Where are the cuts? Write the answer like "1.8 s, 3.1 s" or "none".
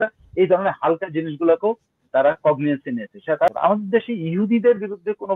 3.5 s